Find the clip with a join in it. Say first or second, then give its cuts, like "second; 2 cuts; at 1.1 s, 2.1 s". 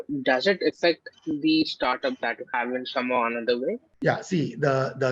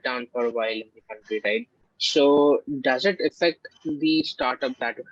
first; 1 cut; at 3.9 s